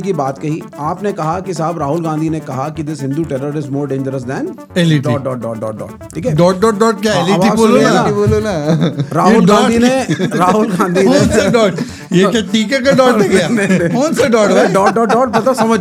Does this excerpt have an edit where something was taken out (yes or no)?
no